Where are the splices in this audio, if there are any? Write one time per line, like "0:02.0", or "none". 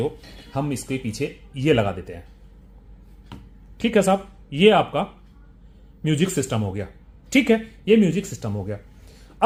none